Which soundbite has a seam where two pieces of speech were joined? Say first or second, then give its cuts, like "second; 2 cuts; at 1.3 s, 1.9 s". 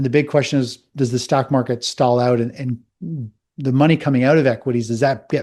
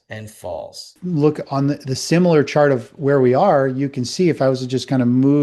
second; 1 cut; at 0.9 s